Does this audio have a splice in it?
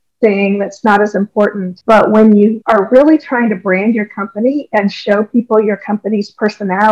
yes; 2 cuts; at 1.7 s, 2.6 s

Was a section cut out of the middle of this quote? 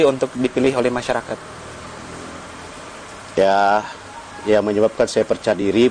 no; 0 cuts

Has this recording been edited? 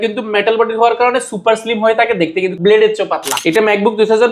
yes; 2 cuts; at 2.5 s, 3.3 s

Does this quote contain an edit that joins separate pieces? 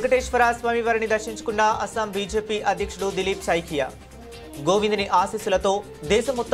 no; 0 cuts

